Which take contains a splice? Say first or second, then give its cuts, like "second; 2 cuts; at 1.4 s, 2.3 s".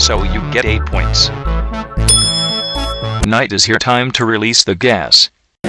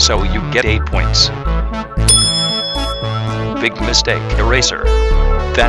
first; 1 cut; at 3.2 s